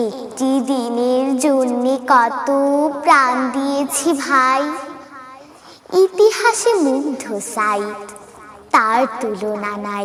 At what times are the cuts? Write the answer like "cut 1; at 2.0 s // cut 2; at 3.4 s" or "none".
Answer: none